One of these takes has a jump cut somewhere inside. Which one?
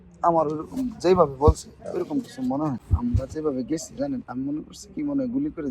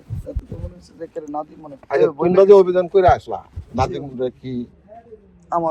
first; 1 cut; at 2.8 s

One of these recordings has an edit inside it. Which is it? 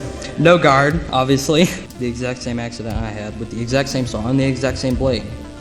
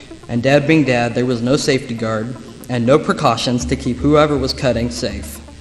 first; 1 cut; at 1.9 s

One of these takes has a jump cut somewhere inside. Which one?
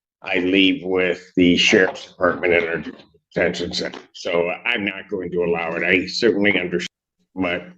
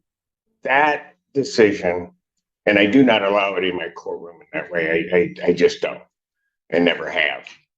first; 1 cut; at 6.9 s

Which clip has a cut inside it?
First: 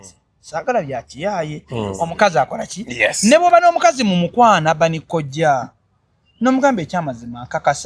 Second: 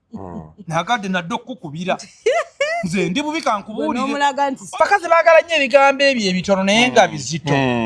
second; 1 cut; at 4.8 s

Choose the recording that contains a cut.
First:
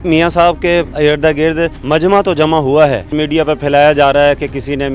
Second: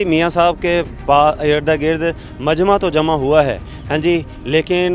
first; 3 cuts; at 0.9 s, 1.8 s, 3.1 s

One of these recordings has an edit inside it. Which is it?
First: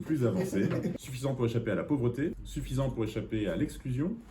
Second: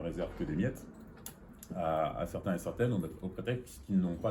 first; 2 cuts; at 1.0 s, 2.5 s

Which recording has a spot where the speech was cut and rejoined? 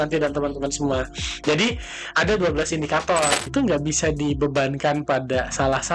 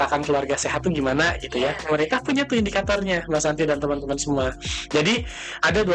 first; 1 cut; at 3.5 s

